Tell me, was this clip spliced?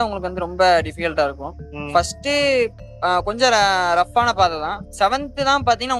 yes; 1 cut; at 5.0 s

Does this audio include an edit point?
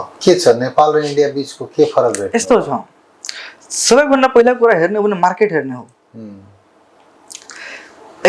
no; 0 cuts

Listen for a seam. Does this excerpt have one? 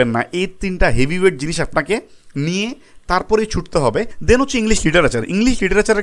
yes; 1 cut; at 4.2 s

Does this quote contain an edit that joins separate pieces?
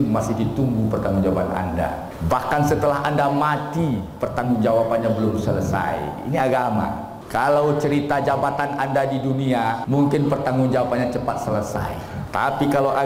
yes; 4 cuts; at 2.1 s, 7.1 s, 9.8 s, 12.1 s

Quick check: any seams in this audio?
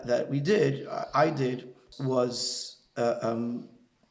yes; 1 cut; at 1.8 s

